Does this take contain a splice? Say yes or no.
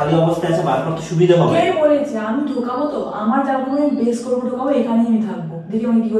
no